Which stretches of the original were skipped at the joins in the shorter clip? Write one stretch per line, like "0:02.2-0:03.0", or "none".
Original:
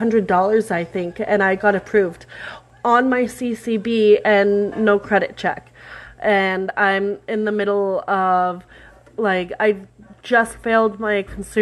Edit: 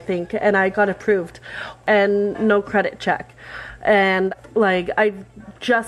0:02.7-0:04.2
0:06.7-0:09.0